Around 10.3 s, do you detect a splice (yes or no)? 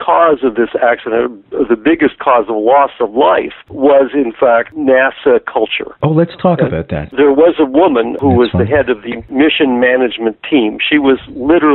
no